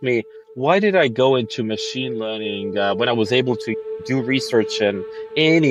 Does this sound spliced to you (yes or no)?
no